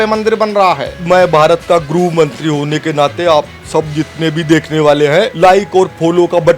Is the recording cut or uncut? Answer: cut